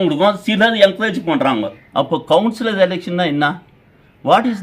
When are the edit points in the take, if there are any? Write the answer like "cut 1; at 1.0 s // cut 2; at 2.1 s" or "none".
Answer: cut 1; at 1.8 s